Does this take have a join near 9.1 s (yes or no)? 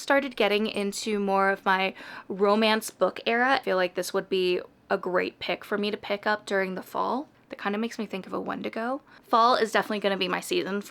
yes